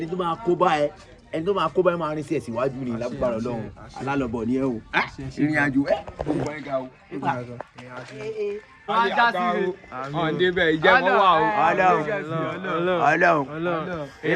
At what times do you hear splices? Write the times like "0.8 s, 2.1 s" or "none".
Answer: none